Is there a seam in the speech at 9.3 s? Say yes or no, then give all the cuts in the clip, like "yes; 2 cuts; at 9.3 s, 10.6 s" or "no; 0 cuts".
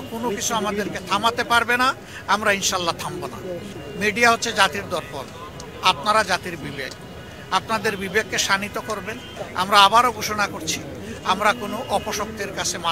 yes; 2 cuts; at 3.7 s, 9.3 s